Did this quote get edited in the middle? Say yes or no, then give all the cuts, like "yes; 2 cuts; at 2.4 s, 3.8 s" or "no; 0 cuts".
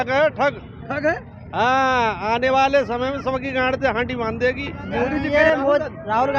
yes; 1 cut; at 5.2 s